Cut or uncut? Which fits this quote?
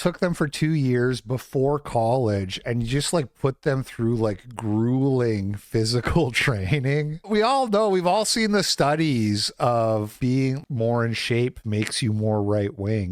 uncut